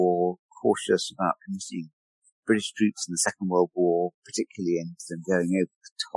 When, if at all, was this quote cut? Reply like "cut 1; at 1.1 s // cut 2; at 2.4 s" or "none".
none